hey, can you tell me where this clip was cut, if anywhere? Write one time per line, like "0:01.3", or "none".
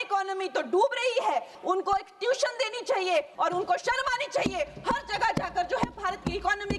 0:01.5
0:03.3